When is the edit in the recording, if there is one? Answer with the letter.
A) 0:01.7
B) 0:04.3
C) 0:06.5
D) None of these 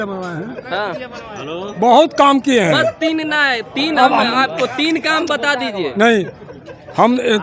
D